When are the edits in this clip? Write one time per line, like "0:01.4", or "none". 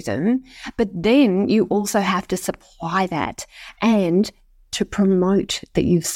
none